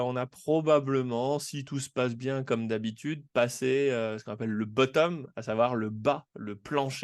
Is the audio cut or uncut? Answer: uncut